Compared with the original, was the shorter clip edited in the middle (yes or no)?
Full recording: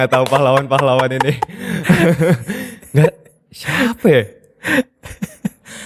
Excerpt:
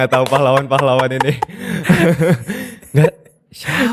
no